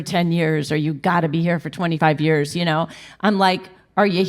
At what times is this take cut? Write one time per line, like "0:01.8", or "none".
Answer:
0:02.0